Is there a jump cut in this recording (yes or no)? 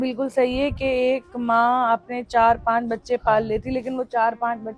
no